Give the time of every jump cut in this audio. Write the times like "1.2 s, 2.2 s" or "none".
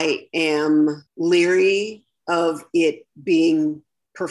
1.1 s